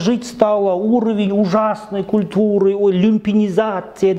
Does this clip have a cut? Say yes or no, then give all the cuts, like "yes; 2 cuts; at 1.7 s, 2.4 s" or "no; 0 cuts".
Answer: no; 0 cuts